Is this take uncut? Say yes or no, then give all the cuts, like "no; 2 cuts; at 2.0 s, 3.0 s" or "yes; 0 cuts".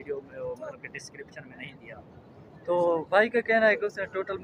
yes; 0 cuts